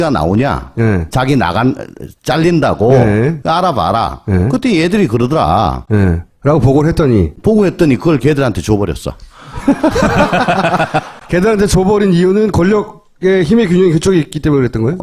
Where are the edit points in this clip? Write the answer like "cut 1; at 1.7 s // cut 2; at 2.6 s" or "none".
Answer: none